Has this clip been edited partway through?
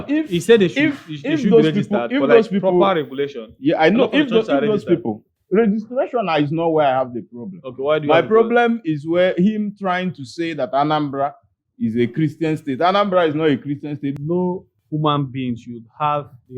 yes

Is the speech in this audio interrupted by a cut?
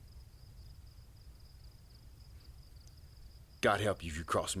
yes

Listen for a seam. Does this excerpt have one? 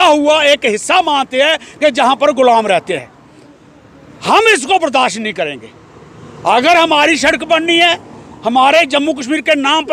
no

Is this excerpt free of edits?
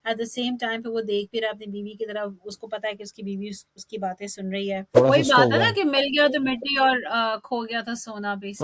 no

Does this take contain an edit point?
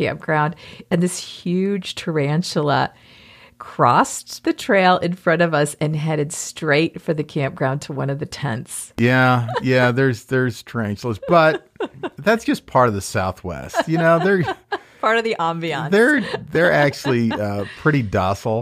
no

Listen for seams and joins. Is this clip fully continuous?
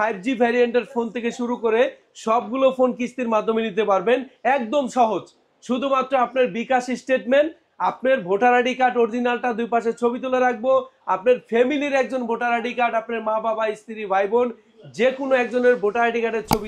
yes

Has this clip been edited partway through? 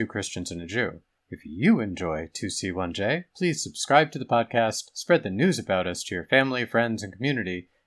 no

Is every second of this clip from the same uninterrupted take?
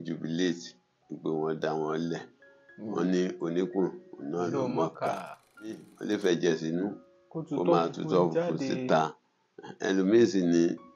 no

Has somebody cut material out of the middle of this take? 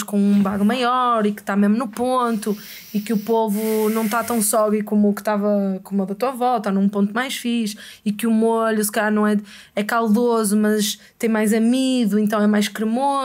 no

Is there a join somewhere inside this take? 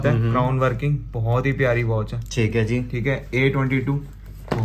no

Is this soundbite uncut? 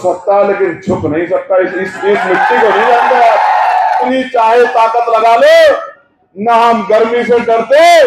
no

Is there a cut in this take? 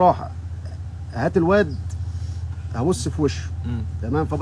no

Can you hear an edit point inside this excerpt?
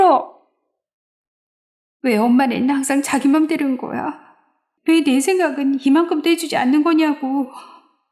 yes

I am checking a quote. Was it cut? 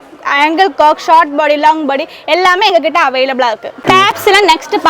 no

